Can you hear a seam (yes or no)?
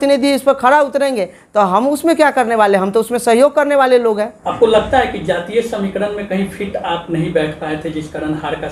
no